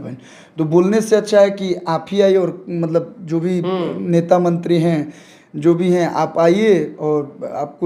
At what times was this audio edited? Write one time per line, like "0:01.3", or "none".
none